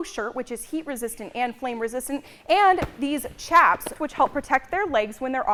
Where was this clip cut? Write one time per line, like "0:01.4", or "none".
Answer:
none